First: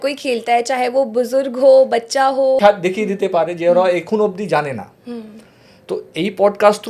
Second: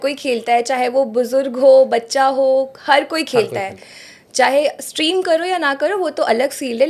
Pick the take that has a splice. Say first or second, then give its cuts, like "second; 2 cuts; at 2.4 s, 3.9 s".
first; 1 cut; at 2.6 s